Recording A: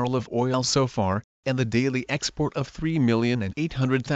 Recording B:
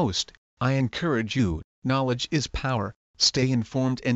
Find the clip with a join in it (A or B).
A